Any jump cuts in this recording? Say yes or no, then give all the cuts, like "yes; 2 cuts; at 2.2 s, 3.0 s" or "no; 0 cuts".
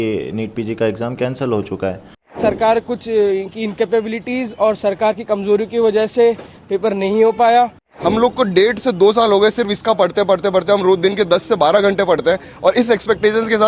yes; 2 cuts; at 2.3 s, 7.9 s